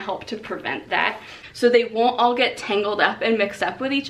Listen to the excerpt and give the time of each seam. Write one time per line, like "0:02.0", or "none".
0:01.4